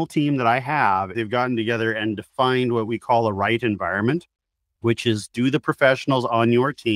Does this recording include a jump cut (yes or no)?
yes